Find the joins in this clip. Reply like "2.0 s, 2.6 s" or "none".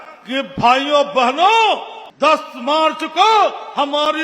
2.0 s